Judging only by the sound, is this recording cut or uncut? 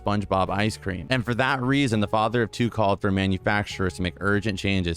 cut